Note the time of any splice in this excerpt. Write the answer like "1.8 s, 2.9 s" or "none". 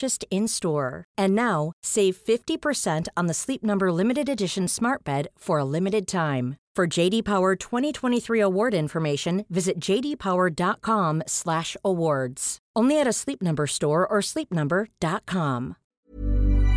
15.8 s